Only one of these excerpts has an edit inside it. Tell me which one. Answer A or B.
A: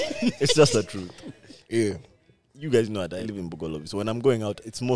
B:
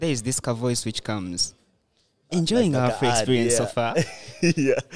A